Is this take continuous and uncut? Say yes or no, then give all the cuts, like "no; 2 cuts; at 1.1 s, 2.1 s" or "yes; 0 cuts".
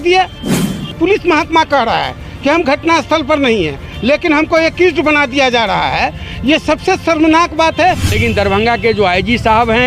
no; 2 cuts; at 1.0 s, 8.1 s